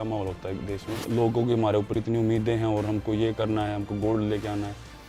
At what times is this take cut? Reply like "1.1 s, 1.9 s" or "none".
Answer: 0.9 s